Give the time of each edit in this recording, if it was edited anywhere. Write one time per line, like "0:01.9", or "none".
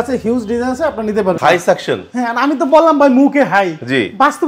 0:01.4

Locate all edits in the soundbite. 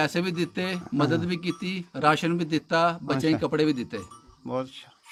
none

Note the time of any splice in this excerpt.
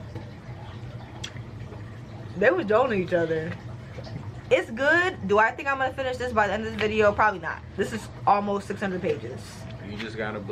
0:04.4
0:07.6

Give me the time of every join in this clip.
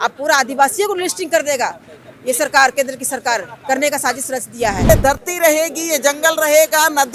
0:04.9

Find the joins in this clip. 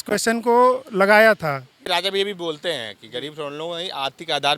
0:01.7

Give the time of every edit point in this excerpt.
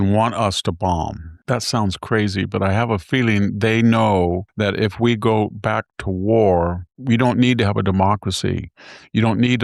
0:01.3
0:04.5
0:06.9

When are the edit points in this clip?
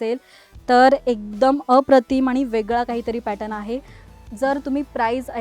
0:04.1

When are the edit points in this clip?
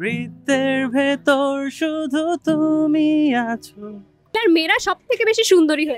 0:04.4

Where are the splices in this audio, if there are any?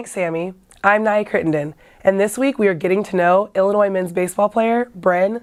none

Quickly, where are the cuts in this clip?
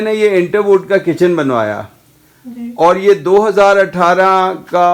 none

